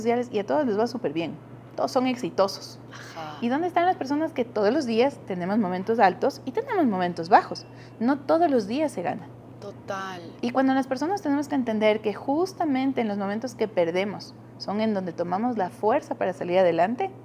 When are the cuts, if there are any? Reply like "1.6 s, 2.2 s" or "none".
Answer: none